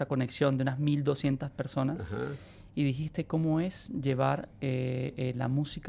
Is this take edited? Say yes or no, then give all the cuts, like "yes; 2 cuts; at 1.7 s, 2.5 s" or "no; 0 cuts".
no; 0 cuts